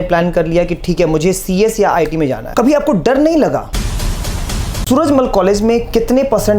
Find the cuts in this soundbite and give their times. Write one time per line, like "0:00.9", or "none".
0:02.4
0:04.3